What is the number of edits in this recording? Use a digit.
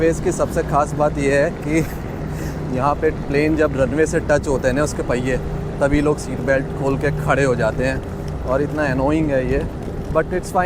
0